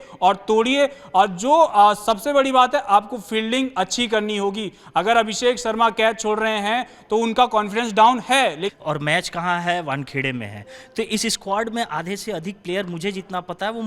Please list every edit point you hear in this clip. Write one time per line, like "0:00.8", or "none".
0:08.7